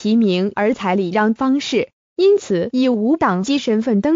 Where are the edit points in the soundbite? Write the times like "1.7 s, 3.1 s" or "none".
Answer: none